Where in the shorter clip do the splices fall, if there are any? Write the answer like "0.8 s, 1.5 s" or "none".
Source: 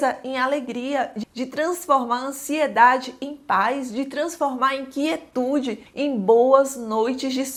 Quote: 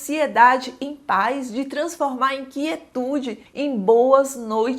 none